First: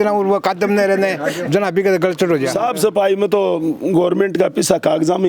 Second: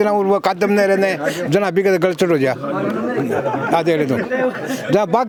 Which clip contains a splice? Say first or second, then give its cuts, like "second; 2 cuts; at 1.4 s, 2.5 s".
first; 1 cut; at 2.5 s